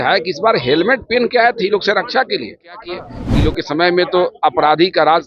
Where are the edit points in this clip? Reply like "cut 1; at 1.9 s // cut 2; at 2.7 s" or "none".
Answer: cut 1; at 3.1 s